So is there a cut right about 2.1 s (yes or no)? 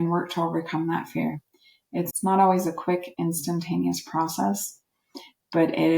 yes